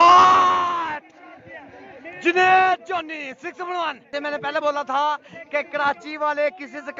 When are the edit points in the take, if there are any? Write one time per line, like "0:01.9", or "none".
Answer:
0:04.1